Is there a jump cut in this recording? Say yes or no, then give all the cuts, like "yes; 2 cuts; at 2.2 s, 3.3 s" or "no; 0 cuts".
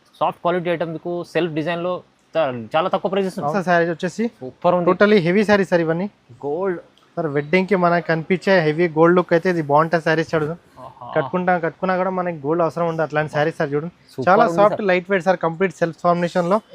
yes; 1 cut; at 3.5 s